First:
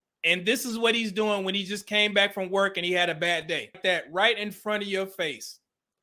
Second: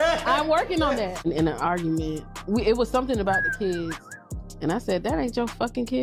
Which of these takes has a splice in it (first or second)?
first